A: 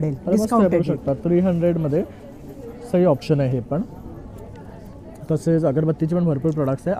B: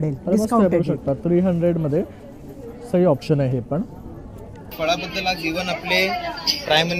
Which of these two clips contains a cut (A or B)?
B